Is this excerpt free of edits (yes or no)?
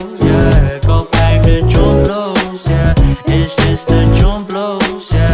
no